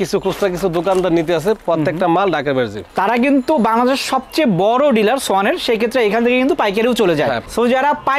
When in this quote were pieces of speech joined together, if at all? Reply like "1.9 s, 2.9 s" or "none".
none